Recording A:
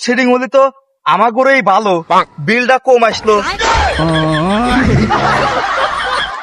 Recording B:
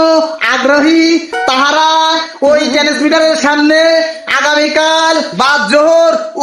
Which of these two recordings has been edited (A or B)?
B